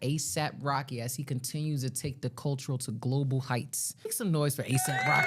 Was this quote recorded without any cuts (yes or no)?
no